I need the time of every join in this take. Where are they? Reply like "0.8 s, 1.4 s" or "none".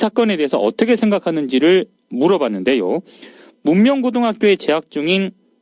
4.3 s